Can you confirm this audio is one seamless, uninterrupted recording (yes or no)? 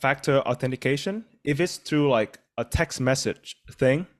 no